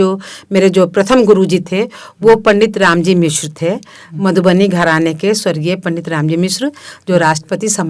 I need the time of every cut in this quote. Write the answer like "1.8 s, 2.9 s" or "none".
none